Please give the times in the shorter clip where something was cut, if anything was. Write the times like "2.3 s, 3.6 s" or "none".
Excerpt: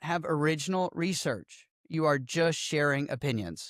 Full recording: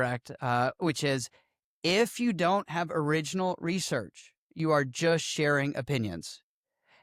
none